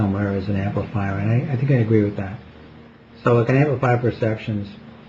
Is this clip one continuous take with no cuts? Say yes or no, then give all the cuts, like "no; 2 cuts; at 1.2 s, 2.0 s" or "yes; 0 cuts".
yes; 0 cuts